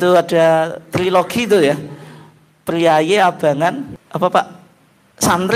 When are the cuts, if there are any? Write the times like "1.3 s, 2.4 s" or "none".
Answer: 4.0 s